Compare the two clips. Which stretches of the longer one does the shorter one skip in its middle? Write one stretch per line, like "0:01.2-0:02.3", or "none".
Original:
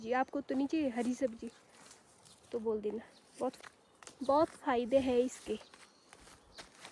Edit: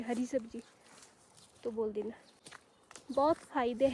0:03.3-0:03.6